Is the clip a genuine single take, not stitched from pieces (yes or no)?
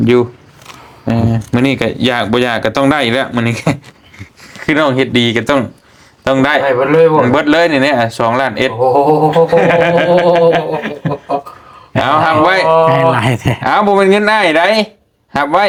yes